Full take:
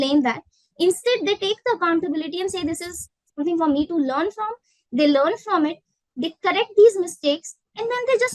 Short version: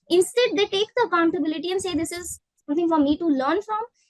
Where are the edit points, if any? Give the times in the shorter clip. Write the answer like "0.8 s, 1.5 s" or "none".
none

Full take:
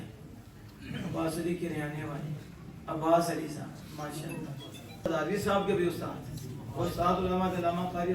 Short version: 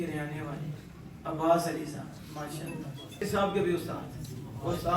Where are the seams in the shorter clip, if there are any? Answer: 3.2 s

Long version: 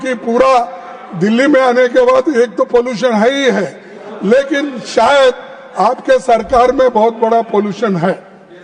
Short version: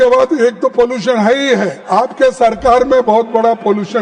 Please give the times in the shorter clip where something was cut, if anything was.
1.8 s

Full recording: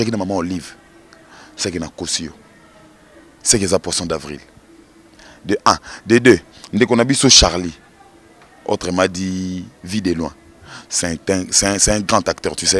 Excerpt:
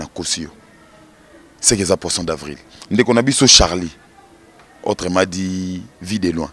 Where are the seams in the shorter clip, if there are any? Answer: 2.7 s

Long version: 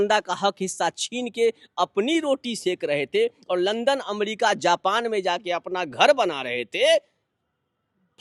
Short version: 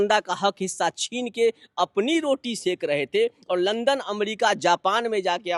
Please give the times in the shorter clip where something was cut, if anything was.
none

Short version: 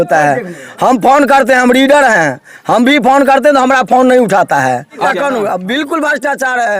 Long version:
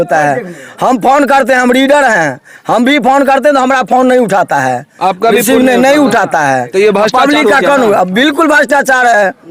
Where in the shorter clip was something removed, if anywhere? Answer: 5.1 s

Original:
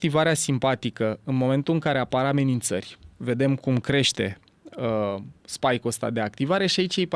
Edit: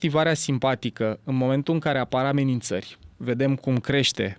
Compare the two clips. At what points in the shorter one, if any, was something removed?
none

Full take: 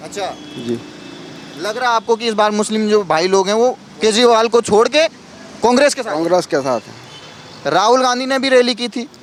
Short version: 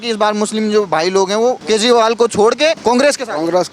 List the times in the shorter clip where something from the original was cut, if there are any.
1.6 s, 2.8 s

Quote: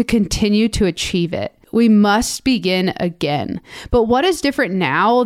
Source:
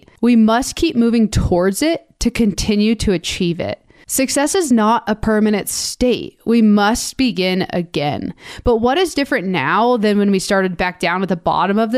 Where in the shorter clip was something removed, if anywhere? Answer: 1.6 s

